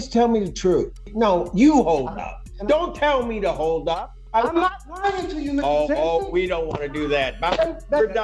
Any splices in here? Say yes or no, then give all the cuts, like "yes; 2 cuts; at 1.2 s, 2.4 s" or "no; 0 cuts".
yes; 2 cuts; at 1.1 s, 4.2 s